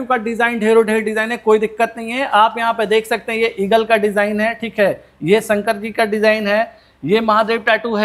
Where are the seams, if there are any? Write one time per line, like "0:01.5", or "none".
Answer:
none

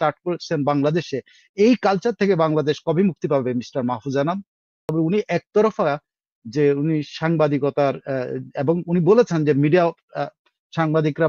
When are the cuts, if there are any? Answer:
0:04.9

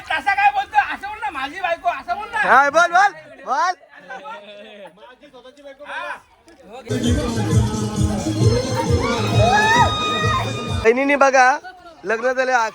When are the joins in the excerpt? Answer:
0:06.9
0:10.9

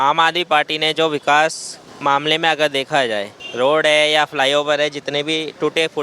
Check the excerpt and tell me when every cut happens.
0:01.8
0:03.4

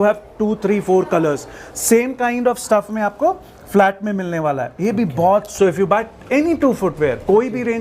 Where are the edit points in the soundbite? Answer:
0:05.5

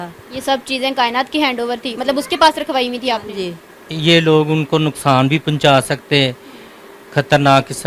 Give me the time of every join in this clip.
0:03.9

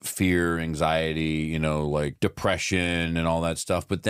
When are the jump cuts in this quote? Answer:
0:02.1

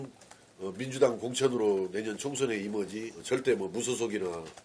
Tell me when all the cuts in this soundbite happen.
0:03.1

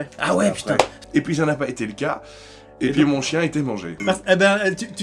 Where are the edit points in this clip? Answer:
0:01.0
0:03.9

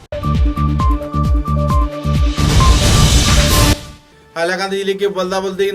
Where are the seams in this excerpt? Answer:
0:03.8

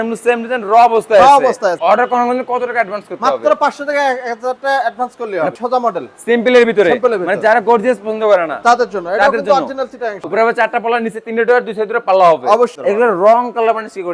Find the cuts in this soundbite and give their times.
0:01.8
0:05.6
0:10.3
0:12.8

